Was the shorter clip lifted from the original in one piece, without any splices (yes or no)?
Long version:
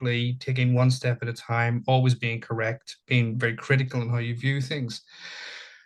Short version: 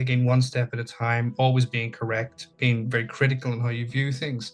yes